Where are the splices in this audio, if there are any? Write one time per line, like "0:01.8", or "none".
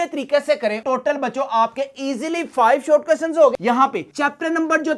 0:00.8
0:03.5